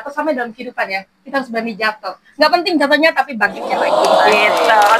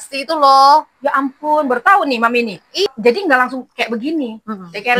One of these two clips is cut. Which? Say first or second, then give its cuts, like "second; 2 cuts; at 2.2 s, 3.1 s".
second; 1 cut; at 2.9 s